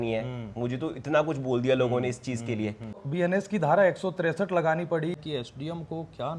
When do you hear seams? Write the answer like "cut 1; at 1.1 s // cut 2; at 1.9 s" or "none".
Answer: cut 1; at 3.0 s // cut 2; at 5.2 s